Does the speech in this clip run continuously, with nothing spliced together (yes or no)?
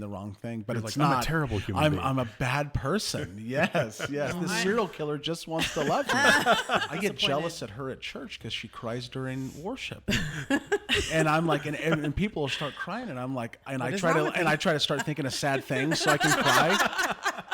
no